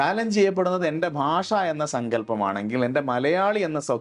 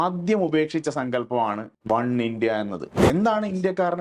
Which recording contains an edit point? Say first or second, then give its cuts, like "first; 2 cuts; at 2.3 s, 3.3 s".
second; 2 cuts; at 1.7 s, 2.9 s